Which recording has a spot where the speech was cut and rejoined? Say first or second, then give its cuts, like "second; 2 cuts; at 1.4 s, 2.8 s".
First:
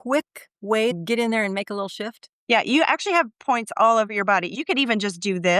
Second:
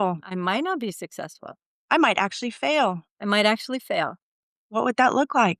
first; 2 cuts; at 0.9 s, 4.5 s